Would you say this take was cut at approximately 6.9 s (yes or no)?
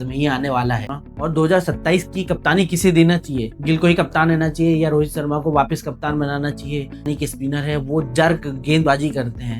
yes